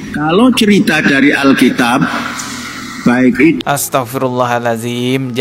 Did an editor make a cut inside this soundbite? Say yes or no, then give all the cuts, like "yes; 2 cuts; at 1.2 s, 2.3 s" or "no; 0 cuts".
yes; 1 cut; at 3.6 s